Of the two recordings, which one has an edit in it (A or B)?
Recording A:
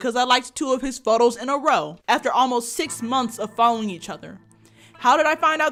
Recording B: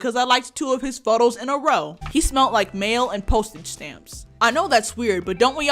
B